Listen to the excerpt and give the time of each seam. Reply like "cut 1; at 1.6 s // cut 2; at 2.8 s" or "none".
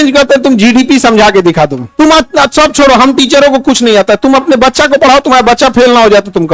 none